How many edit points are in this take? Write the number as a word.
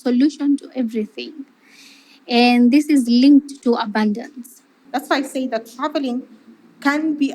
one